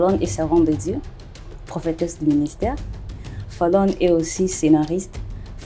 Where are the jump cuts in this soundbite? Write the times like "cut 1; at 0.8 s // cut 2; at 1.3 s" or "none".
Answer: none